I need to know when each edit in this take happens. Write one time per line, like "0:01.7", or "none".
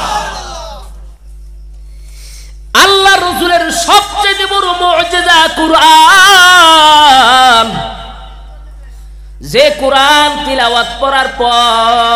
0:01.2